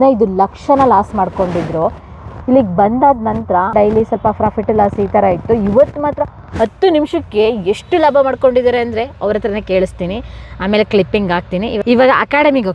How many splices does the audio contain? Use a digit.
0